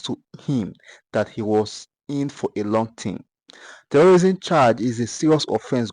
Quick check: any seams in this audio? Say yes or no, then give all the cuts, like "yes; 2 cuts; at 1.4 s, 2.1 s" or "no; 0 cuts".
no; 0 cuts